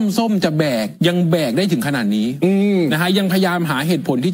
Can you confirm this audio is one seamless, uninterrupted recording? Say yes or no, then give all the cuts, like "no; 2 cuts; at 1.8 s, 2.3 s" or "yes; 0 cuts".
no; 1 cut; at 0.9 s